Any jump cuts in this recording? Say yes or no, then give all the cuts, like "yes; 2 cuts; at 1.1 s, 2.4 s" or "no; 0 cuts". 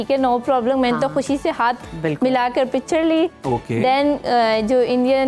no; 0 cuts